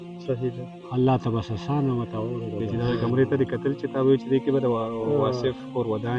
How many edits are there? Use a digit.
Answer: 1